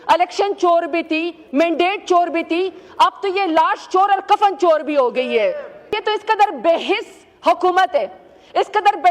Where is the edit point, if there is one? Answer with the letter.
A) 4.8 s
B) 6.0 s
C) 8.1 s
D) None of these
B